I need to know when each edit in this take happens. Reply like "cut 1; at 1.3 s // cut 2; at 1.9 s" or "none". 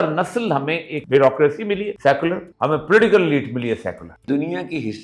cut 1; at 0.9 s // cut 2; at 1.9 s // cut 3; at 2.5 s // cut 4; at 4.2 s